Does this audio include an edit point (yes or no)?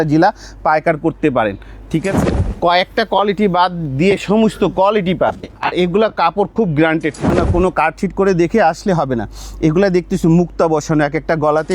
yes